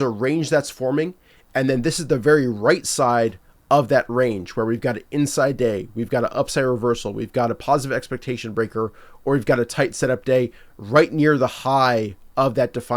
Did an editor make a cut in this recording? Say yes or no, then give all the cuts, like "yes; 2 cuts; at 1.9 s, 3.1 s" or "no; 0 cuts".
no; 0 cuts